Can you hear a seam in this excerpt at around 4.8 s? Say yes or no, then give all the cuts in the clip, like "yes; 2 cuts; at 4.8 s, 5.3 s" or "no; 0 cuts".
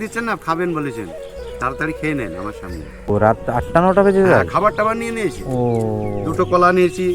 no; 1 cut; at 3.1 s